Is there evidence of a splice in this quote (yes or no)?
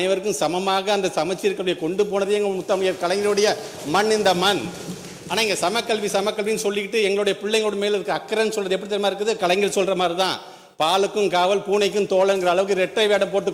no